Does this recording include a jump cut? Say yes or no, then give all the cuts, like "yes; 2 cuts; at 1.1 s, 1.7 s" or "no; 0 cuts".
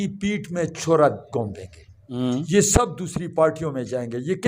yes; 1 cut; at 2.1 s